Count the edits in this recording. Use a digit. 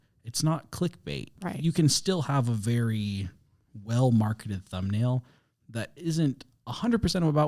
1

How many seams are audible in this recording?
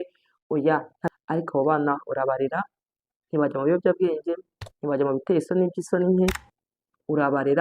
1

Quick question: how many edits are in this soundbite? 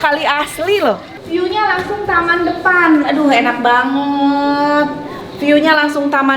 1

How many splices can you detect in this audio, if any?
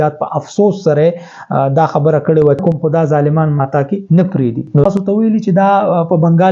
2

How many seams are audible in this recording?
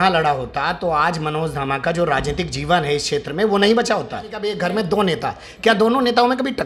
1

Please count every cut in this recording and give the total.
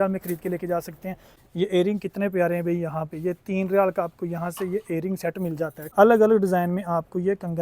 2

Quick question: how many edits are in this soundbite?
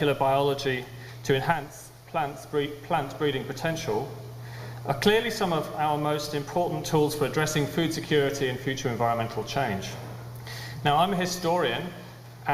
1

